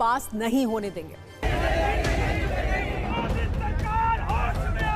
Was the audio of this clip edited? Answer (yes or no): yes